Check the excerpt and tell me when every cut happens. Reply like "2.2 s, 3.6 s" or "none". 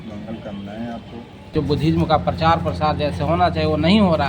1.5 s